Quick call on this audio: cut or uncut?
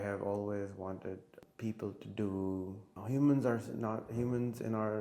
cut